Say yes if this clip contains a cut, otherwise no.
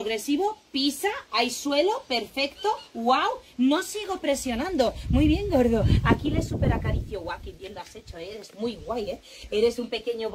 no